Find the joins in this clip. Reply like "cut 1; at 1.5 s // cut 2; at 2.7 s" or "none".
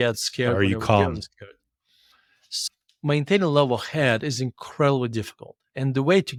none